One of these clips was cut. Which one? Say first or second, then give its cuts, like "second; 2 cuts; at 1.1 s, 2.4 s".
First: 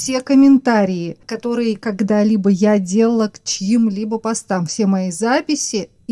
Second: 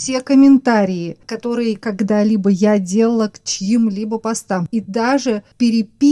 second; 1 cut; at 4.7 s